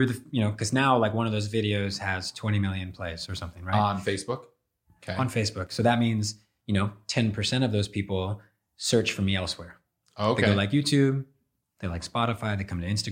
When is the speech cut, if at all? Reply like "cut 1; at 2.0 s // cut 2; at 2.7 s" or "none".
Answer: none